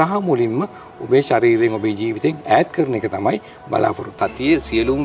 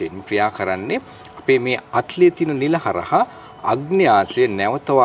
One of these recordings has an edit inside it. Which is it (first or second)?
first